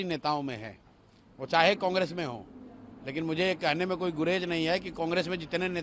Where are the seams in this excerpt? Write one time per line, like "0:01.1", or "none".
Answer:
none

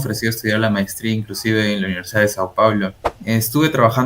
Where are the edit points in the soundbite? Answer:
0:03.1

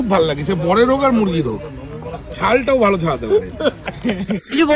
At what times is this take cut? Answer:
0:03.8

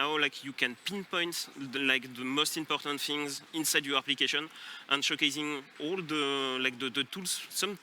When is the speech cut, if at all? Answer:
0:03.4
0:05.7

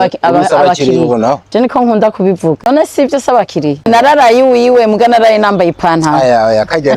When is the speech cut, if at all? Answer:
0:02.7
0:03.9

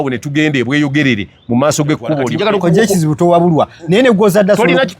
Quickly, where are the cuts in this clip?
0:02.3

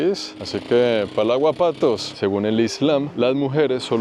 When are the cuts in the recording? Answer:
0:02.1

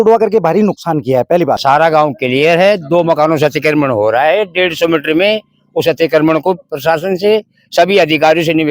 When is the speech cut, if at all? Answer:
0:01.6

